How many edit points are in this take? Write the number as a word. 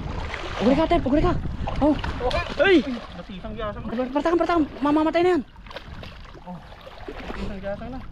one